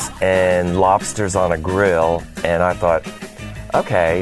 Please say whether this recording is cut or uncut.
uncut